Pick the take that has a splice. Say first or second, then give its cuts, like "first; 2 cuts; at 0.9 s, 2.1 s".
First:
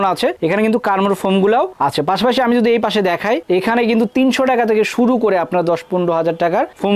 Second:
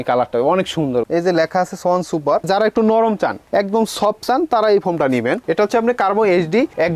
second; 3 cuts; at 1.1 s, 2.5 s, 5.4 s